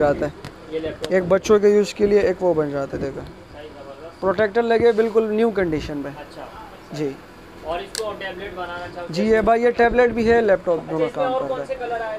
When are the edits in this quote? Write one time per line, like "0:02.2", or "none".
none